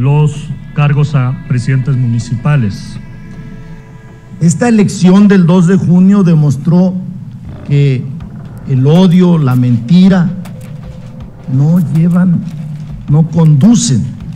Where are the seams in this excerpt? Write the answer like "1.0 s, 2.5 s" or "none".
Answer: 3.9 s